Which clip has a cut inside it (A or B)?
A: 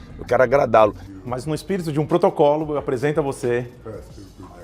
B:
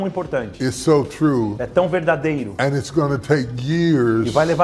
A